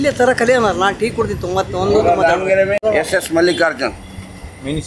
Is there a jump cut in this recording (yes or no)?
yes